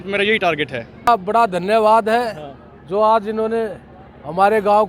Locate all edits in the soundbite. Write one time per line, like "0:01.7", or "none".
0:01.1